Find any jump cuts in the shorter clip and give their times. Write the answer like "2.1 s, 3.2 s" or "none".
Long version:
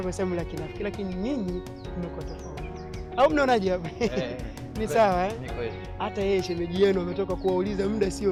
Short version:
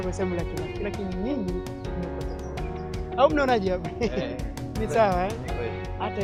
none